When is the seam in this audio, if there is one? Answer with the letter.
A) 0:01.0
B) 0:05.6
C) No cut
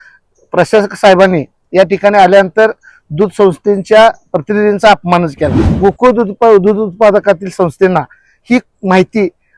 B